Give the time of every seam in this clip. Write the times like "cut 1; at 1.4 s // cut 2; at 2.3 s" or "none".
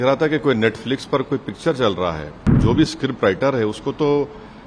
cut 1; at 2.5 s